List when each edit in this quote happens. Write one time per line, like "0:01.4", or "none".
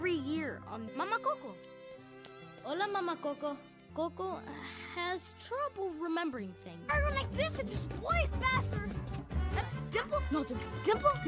0:03.8